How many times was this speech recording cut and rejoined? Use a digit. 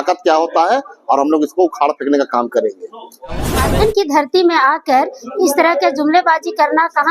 1